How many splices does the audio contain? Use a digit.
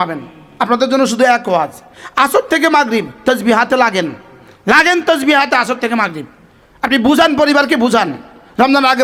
0